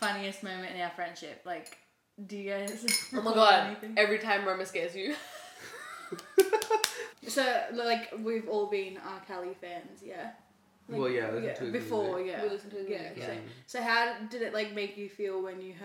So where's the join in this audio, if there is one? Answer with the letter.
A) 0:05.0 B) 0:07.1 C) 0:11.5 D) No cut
B